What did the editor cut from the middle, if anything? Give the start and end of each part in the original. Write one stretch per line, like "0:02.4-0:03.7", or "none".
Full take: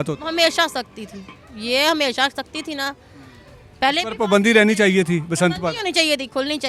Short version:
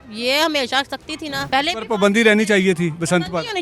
0:02.9-0:03.7